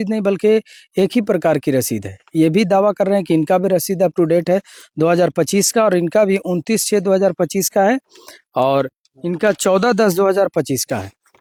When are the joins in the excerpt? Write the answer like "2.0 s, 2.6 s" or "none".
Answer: none